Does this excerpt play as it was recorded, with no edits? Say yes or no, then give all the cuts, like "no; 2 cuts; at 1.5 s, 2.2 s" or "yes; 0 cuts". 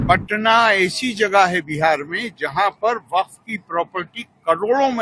yes; 0 cuts